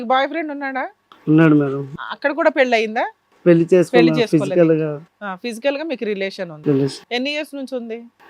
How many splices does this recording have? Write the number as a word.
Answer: one